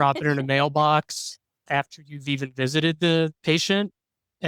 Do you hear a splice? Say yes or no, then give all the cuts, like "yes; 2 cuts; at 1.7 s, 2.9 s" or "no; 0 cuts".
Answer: no; 0 cuts